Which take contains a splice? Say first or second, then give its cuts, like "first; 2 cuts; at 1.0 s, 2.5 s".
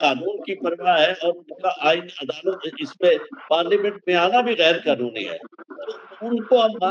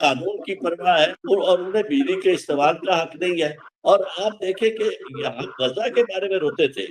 second; 1 cut; at 1.2 s